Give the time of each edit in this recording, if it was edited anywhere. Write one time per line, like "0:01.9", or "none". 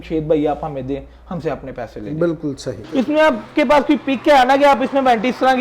0:02.8